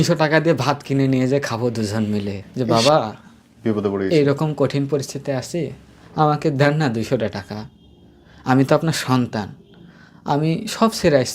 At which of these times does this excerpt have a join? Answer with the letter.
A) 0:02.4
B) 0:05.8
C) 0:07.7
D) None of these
A